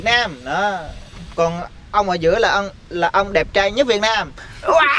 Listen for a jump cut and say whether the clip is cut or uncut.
uncut